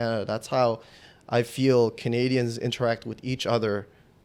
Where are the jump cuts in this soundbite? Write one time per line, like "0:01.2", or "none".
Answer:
none